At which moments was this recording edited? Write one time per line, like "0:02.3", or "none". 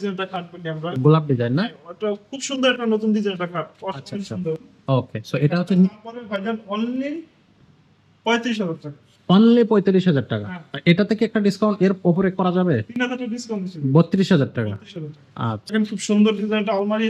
0:15.7